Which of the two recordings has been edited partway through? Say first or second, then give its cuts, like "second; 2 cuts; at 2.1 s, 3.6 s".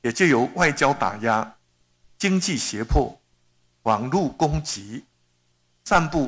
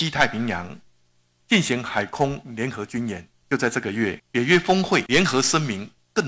second; 3 cuts; at 3.3 s, 4.2 s, 5.1 s